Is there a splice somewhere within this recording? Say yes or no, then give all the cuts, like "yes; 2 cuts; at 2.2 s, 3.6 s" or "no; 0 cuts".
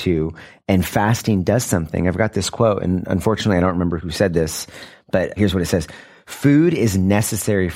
yes; 2 cuts; at 4.0 s, 5.4 s